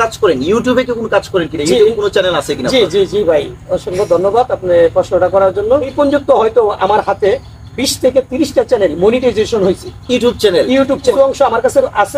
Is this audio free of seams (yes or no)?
no